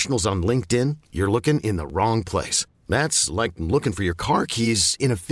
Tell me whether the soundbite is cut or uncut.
uncut